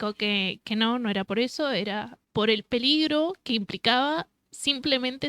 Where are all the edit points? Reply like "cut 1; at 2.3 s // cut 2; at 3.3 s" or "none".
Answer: cut 1; at 2.1 s